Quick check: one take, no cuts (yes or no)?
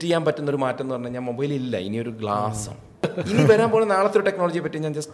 no